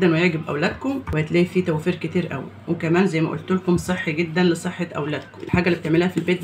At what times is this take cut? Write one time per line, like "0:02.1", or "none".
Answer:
0:01.1
0:05.4